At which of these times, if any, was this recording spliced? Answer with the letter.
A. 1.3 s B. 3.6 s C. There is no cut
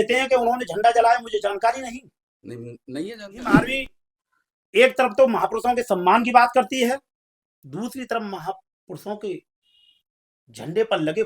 B